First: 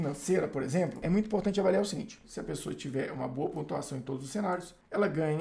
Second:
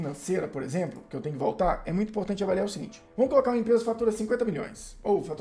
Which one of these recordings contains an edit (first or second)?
first